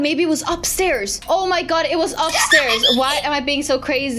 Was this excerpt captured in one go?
yes; 0 cuts

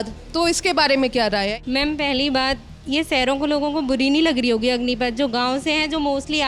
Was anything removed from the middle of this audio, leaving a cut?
yes; 1 cut; at 1.6 s

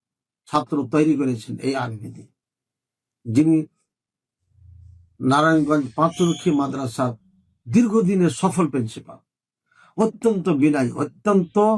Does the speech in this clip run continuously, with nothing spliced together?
yes; 0 cuts

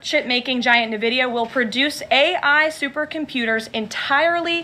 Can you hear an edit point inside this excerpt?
no; 0 cuts

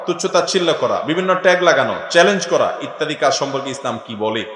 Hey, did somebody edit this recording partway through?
no; 0 cuts

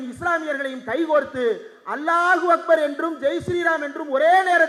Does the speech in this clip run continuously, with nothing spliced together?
yes; 0 cuts

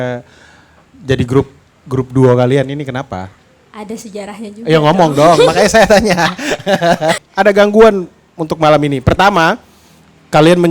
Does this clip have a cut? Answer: yes; 1 cut; at 7.2 s

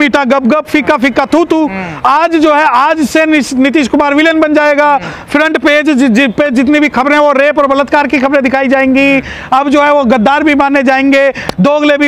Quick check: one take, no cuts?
yes; 0 cuts

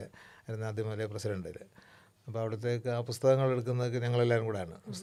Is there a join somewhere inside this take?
no; 0 cuts

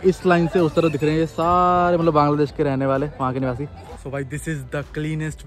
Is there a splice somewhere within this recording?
yes; 1 cut; at 3.9 s

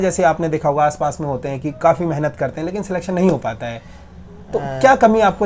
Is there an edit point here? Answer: no; 0 cuts

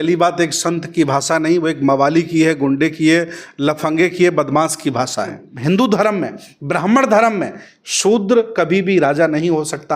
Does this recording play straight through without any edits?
no; 1 cut; at 5.5 s

